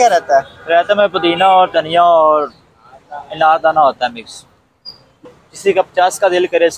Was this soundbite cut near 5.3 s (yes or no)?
yes